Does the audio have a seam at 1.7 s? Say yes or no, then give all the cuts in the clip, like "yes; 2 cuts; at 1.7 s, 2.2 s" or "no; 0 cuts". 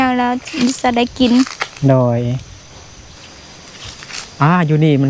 no; 1 cut; at 3.0 s